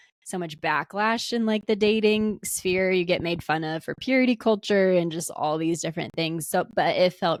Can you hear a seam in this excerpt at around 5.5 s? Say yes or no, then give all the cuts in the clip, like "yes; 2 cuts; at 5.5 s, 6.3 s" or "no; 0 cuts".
no; 0 cuts